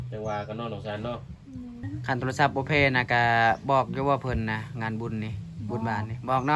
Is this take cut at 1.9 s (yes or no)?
yes